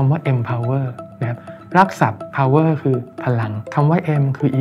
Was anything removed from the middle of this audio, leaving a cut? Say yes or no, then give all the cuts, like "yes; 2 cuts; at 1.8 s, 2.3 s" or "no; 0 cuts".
yes; 1 cut; at 3.6 s